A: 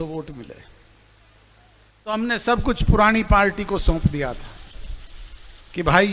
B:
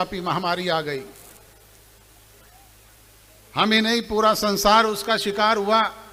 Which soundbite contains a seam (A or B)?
A